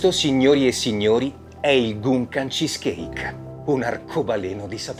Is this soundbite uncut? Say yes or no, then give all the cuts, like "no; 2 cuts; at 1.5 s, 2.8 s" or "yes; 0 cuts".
yes; 0 cuts